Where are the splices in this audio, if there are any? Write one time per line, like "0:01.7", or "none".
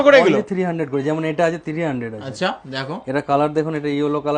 none